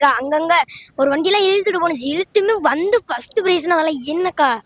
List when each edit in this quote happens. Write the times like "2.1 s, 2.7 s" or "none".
none